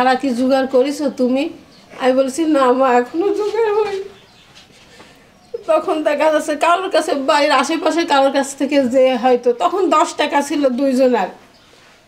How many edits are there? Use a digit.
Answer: 0